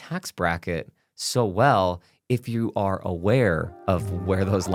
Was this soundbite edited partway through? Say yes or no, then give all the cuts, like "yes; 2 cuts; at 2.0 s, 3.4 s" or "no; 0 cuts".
no; 0 cuts